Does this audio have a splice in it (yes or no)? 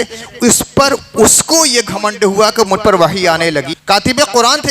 yes